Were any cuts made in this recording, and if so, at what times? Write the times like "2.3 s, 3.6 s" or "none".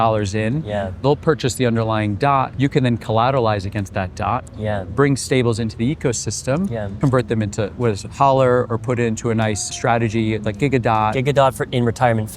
2.5 s, 6.9 s, 9.7 s, 11.2 s